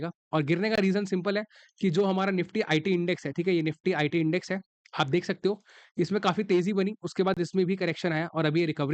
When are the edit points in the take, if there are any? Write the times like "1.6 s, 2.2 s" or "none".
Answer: none